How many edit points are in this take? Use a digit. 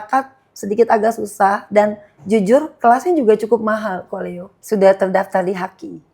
1